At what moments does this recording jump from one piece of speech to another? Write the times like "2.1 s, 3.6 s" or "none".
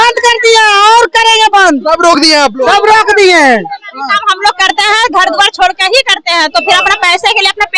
none